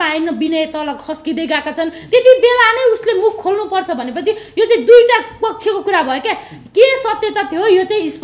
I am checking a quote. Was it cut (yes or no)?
no